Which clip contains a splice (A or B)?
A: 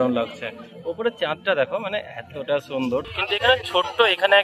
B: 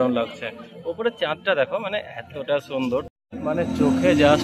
B